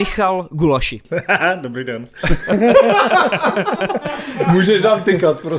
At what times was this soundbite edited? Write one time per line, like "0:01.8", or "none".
0:01.0

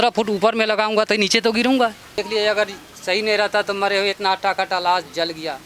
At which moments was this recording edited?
0:02.1

